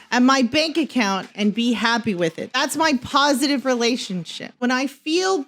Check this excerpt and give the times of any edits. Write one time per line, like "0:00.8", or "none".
0:02.4
0:04.6